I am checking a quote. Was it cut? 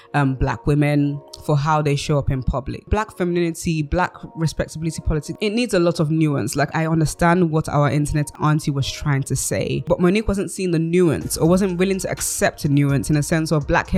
yes; 5 cuts; at 2.9 s, 5.3 s, 6.7 s, 8.3 s, 9.8 s

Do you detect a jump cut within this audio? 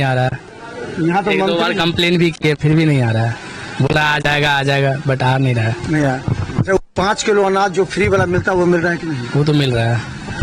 no; 0 cuts

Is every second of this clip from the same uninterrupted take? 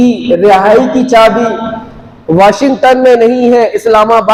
yes; 0 cuts

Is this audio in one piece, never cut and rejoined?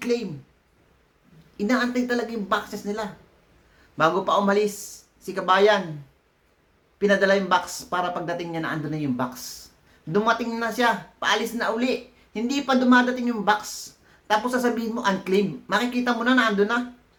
yes; 0 cuts

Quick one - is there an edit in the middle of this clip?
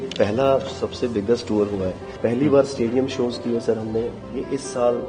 yes; 1 cut; at 2.1 s

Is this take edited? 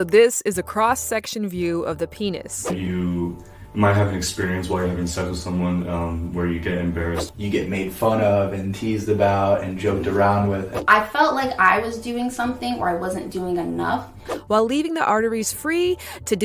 yes; 4 cuts; at 2.7 s, 7.2 s, 10.7 s, 14.3 s

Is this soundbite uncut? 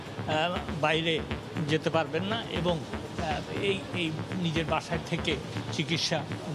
yes; 0 cuts

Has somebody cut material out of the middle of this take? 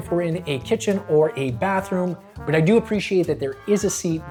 no; 0 cuts

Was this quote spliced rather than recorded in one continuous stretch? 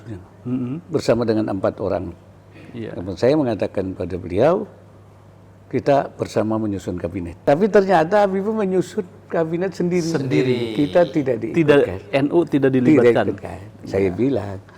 yes; 1 cut; at 7.3 s

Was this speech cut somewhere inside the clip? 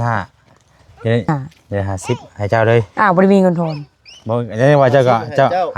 yes; 1 cut; at 1.3 s

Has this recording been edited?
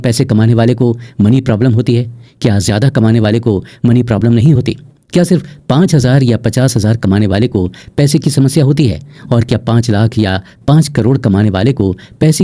no; 0 cuts

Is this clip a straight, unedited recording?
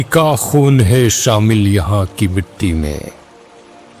yes; 0 cuts

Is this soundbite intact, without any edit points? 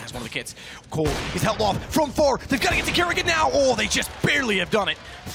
yes; 0 cuts

